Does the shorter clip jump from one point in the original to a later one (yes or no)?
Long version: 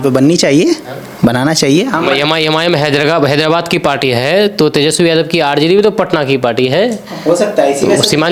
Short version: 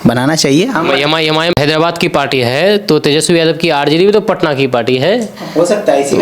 yes